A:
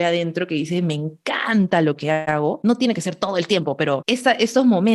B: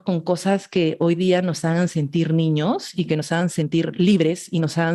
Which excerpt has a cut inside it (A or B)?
A